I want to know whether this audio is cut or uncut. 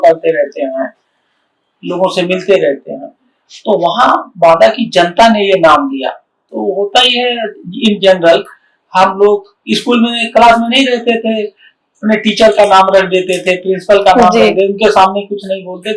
uncut